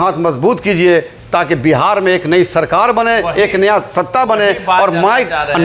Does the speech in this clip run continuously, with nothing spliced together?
yes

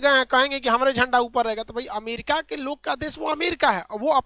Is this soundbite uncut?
yes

